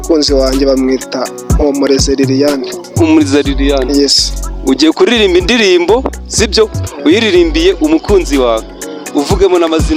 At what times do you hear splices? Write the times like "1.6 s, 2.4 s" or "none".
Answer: none